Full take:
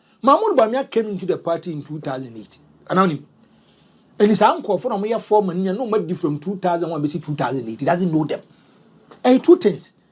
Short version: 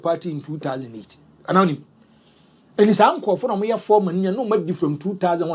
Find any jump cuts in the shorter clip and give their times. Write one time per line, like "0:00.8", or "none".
none